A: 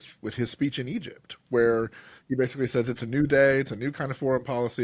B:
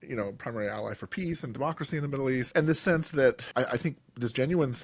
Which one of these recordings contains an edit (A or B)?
B